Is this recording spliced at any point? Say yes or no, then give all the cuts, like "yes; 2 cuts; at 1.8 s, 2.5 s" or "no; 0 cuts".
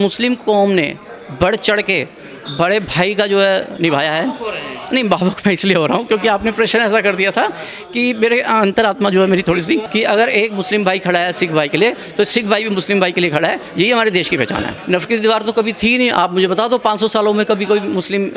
yes; 2 cuts; at 9.9 s, 14.7 s